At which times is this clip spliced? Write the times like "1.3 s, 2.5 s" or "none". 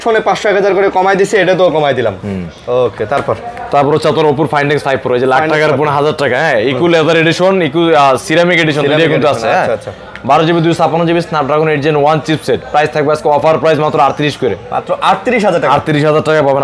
none